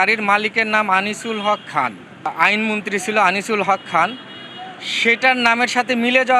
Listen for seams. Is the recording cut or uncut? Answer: cut